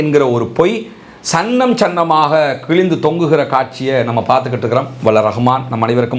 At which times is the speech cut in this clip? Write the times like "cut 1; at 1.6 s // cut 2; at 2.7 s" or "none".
none

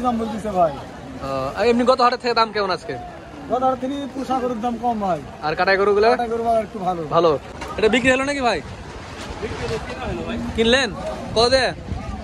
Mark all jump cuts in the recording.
cut 1; at 7.5 s

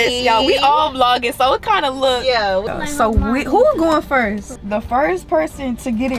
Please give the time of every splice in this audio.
cut 1; at 2.7 s // cut 2; at 4.5 s

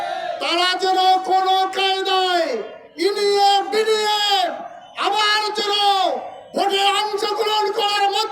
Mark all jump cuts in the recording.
none

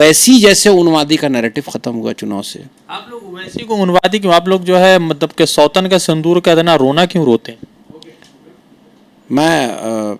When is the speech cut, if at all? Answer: none

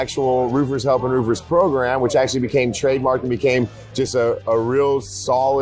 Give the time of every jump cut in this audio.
none

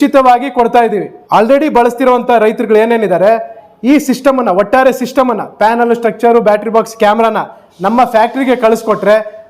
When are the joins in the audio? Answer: cut 1; at 1.1 s

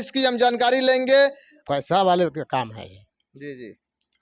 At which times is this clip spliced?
cut 1; at 1.5 s

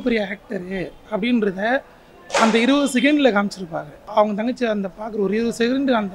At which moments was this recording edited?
cut 1; at 4.1 s

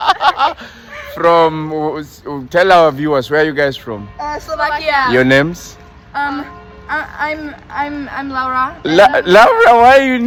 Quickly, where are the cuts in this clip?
none

